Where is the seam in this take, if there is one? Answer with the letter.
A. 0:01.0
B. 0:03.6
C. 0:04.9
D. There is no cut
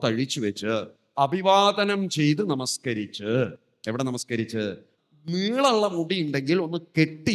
C